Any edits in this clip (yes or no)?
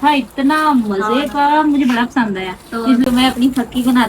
yes